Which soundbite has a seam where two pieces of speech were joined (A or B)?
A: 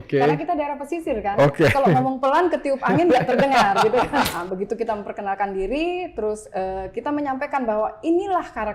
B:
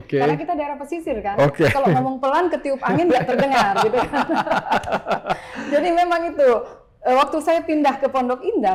A